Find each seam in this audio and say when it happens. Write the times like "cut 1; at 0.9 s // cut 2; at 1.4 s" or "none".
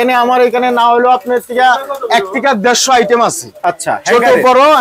none